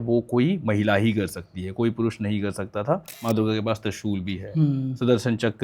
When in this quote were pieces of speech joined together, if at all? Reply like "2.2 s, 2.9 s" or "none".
3.1 s